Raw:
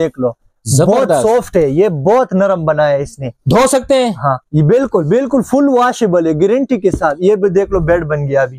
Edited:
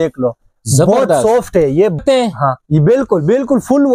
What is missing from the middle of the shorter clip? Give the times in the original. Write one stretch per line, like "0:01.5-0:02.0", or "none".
0:02.0-0:03.8